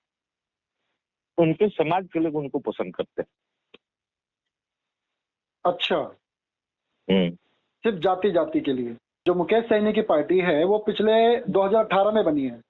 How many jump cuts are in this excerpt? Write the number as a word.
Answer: one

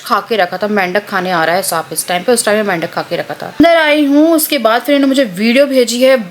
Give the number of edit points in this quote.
one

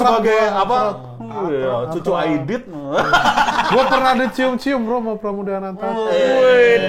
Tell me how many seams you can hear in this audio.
zero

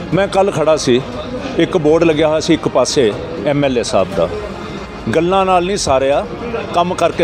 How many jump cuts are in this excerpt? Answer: zero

